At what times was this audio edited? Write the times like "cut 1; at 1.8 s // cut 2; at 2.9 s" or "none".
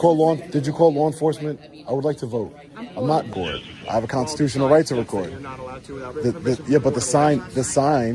cut 1; at 3.3 s

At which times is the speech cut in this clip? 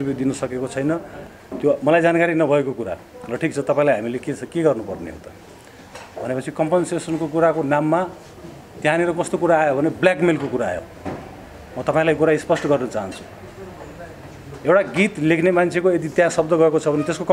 cut 1; at 1.4 s

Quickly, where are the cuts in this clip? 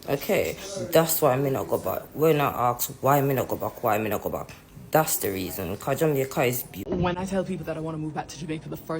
cut 1; at 6.7 s

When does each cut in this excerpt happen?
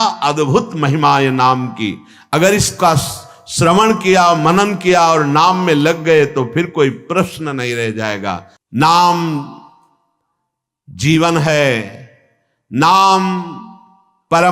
cut 1; at 8.5 s

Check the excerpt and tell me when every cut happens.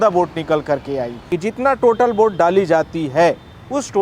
cut 1; at 1.1 s

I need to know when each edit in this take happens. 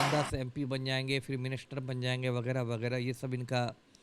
none

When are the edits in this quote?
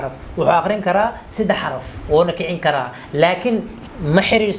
none

